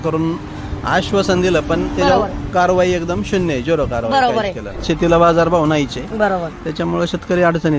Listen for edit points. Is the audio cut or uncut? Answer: cut